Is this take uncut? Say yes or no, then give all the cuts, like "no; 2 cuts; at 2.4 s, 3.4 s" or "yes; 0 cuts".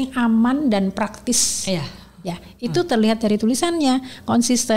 yes; 0 cuts